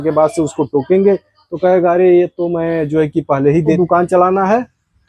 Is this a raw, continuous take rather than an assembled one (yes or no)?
no